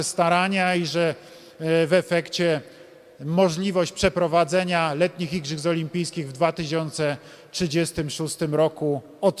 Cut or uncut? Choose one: uncut